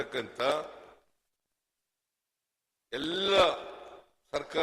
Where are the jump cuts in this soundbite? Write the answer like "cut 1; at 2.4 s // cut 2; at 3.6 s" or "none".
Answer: none